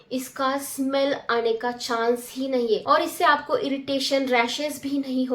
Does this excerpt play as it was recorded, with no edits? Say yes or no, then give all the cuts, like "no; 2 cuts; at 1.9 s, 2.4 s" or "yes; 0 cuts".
no; 1 cut; at 2.8 s